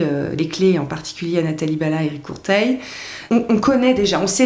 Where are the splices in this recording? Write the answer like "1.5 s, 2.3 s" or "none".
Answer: 3.2 s